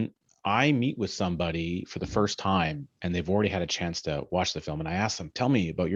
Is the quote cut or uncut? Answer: uncut